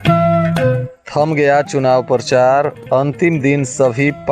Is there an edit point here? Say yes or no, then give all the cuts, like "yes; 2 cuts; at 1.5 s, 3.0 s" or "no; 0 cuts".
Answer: yes; 1 cut; at 0.9 s